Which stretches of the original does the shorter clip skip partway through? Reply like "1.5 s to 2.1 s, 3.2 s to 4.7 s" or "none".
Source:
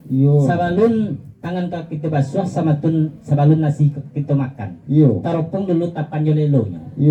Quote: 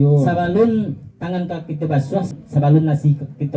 2.5 s to 3.1 s